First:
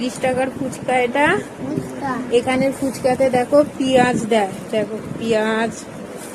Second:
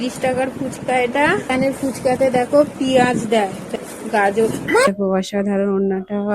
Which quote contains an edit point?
second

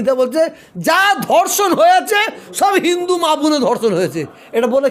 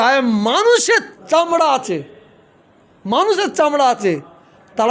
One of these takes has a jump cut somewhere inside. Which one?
second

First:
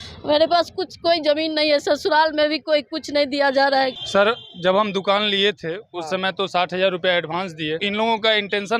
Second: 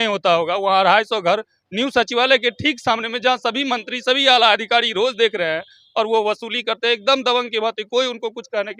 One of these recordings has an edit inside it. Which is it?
first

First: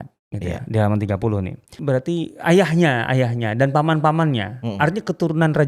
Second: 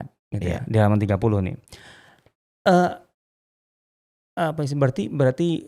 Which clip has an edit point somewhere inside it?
first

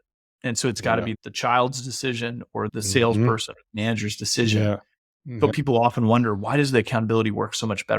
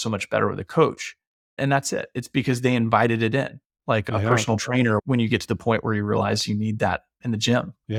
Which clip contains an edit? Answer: first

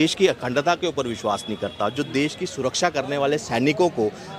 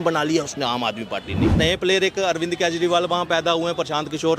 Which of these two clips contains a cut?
second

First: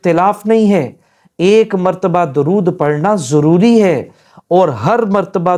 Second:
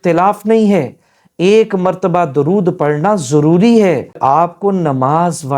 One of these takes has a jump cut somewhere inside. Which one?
second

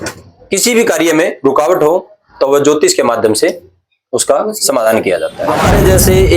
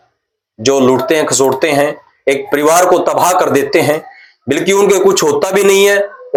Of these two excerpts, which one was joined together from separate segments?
first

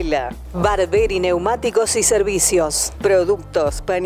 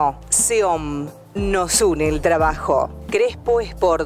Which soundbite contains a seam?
first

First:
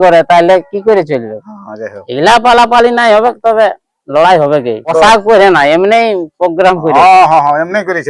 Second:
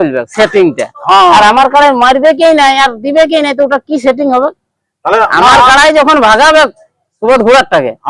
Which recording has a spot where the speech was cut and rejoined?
first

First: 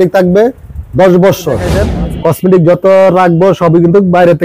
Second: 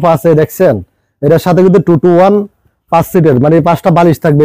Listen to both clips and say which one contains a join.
first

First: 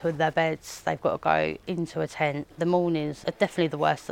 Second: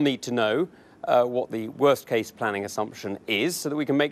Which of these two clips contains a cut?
first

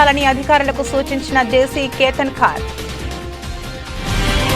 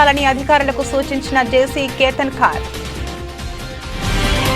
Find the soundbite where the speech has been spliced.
second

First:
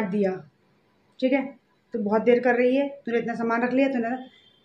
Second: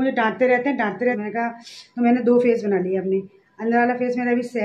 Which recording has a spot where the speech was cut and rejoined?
second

